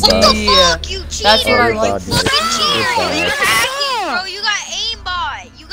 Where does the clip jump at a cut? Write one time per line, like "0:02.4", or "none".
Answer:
none